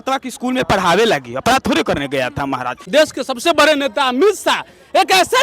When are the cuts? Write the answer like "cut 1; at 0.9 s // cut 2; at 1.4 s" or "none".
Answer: cut 1; at 2.7 s